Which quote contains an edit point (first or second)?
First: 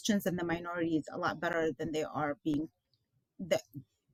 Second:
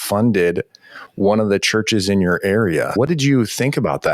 second